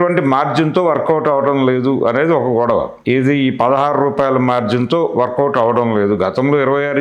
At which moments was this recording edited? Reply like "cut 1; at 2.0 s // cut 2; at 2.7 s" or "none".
cut 1; at 2.9 s